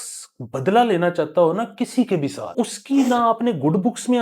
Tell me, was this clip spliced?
yes; 1 cut; at 2.5 s

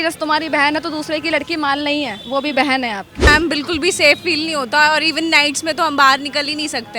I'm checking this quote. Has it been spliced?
yes; 1 cut; at 3.3 s

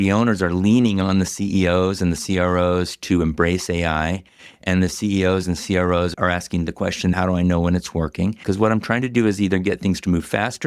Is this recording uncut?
no; 3 cuts; at 6.1 s, 7.2 s, 8.4 s

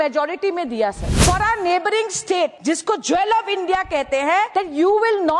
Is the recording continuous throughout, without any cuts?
no; 3 cuts; at 1.1 s, 2.6 s, 4.5 s

